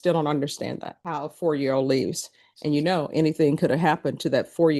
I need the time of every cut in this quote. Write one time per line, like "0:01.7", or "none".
0:00.9